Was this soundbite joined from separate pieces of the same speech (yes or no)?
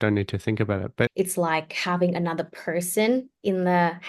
yes